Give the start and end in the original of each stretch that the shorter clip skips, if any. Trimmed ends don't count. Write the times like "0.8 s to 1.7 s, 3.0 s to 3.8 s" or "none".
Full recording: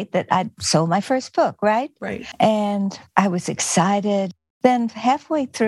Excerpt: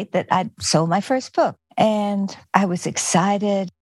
1.6 s to 2.2 s